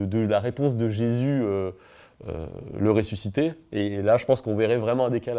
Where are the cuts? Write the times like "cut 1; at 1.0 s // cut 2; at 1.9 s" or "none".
none